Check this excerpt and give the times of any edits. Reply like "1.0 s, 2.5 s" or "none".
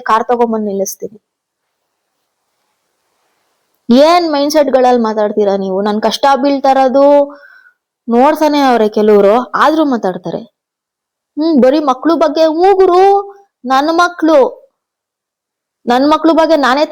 none